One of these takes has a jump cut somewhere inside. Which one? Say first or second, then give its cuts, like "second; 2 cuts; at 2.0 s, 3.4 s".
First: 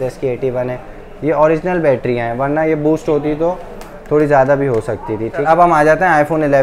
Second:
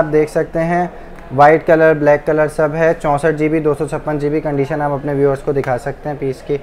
first; 1 cut; at 5.4 s